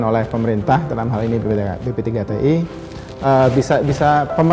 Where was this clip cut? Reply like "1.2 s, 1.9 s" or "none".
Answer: none